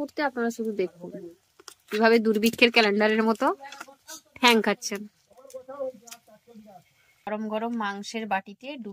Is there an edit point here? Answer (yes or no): yes